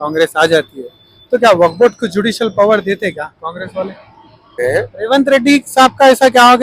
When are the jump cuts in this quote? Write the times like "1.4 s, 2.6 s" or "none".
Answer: 4.6 s